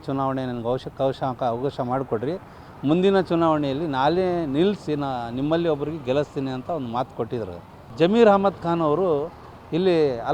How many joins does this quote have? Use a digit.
1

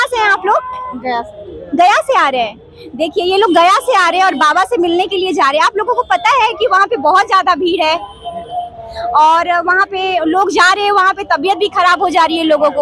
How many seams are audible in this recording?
0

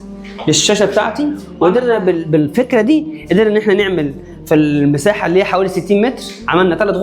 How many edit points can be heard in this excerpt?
1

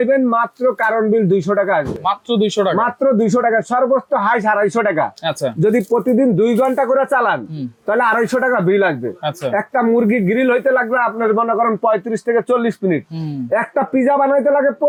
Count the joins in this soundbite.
0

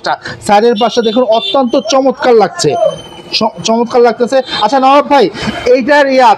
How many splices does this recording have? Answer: 0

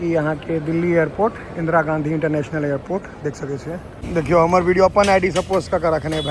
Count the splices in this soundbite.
1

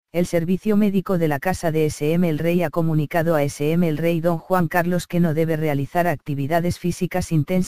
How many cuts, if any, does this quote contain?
1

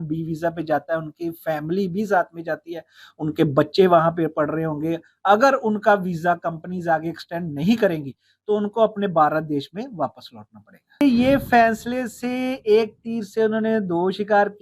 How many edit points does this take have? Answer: 1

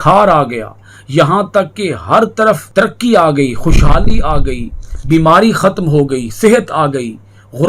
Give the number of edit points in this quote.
1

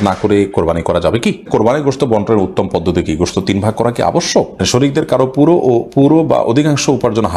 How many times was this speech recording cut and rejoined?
2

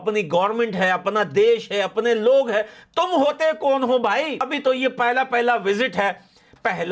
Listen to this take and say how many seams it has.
1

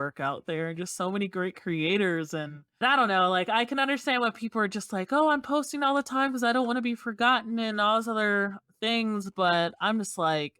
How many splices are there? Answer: 1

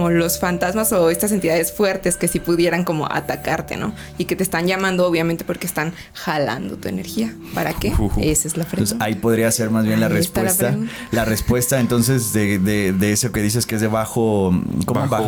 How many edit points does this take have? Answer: 0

